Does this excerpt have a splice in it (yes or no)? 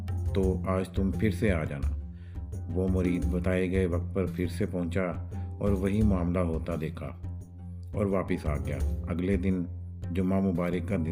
no